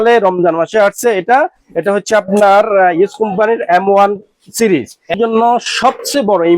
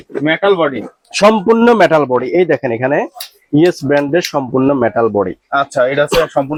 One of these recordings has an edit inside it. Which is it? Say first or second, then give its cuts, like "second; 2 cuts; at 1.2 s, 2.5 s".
first; 1 cut; at 5.1 s